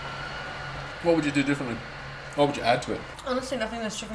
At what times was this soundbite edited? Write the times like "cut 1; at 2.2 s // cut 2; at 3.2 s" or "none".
cut 1; at 0.9 s // cut 2; at 3.1 s